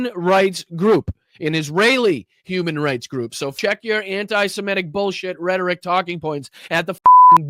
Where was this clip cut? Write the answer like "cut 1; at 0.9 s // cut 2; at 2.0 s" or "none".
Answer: cut 1; at 3.5 s